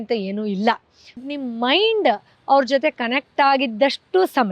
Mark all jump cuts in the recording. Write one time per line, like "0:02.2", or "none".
0:01.3